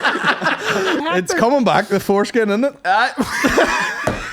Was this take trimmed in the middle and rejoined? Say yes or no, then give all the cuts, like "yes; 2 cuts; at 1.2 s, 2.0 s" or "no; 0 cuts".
yes; 1 cut; at 1.0 s